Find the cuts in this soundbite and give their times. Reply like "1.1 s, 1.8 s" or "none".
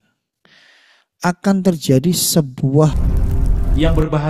3.1 s